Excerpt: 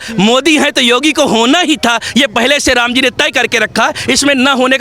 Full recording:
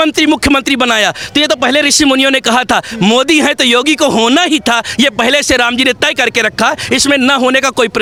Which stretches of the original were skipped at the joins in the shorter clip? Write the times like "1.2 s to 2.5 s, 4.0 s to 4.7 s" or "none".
none

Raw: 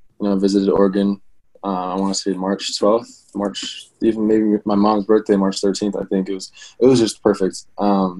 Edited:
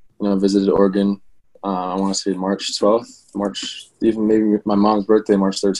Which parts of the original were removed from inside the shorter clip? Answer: none

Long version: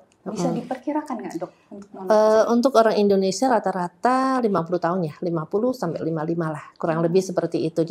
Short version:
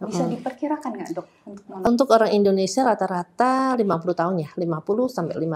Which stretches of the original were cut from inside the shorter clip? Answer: 2.1 s to 2.5 s

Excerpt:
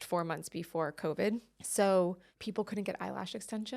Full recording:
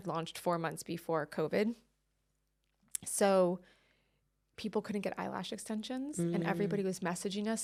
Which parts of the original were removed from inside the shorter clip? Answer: 1.9 s to 3.0 s, 3.7 s to 4.5 s

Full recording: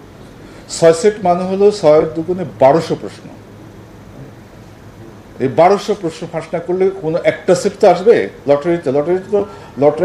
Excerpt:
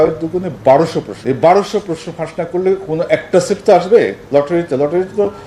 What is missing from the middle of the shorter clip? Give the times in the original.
3.1 s to 5.3 s

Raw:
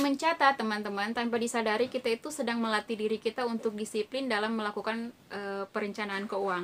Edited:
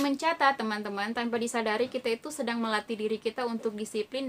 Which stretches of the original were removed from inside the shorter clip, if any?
none

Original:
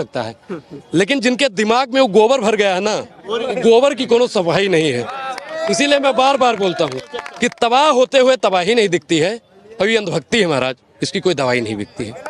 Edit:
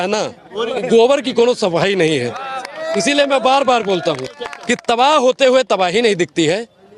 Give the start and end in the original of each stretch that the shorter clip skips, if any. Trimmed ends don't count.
none

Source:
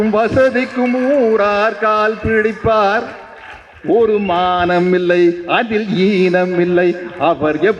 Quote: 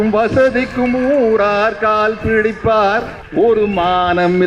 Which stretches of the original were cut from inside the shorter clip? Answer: 3.2 s to 3.7 s

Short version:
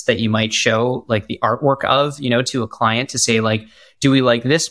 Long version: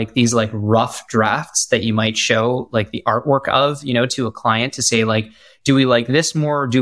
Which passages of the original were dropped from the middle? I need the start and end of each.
none

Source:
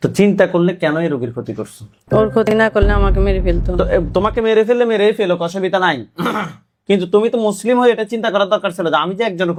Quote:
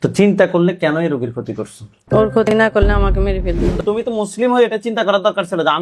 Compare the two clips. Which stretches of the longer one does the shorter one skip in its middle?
3.8 s to 7.0 s

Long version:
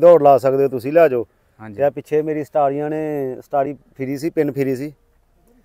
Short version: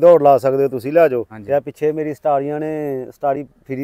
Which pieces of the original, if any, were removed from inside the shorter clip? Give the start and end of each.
1.3 s to 1.6 s

